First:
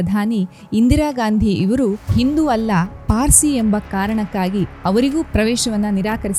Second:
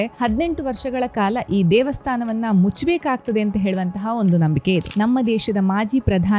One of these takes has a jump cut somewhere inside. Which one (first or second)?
second